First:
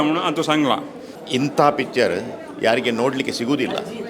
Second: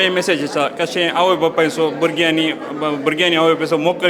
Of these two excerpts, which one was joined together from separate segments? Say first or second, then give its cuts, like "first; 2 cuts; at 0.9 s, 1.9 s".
first; 1 cut; at 1.1 s